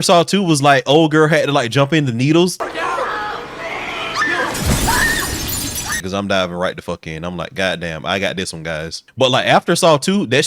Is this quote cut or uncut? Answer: cut